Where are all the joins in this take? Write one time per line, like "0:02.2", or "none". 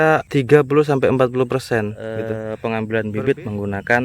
0:02.5